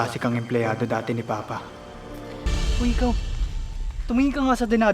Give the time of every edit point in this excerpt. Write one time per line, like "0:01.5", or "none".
0:02.5